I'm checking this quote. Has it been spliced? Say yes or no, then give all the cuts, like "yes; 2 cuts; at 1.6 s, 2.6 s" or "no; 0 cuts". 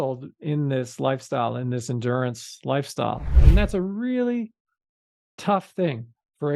yes; 1 cut; at 3.4 s